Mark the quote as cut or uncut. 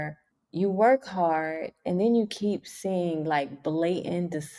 uncut